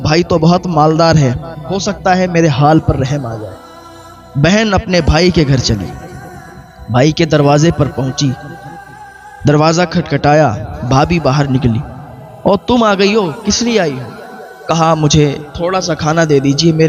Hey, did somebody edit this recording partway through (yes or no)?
no